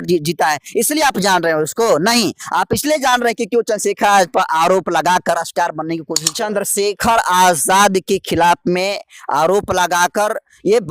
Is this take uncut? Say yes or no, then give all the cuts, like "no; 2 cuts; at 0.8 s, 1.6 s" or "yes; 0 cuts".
no; 1 cut; at 6.2 s